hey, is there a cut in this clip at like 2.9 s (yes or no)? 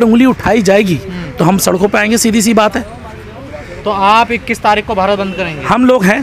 no